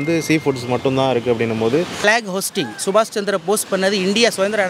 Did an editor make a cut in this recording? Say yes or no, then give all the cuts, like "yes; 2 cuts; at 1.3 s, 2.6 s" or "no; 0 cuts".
yes; 1 cut; at 1.9 s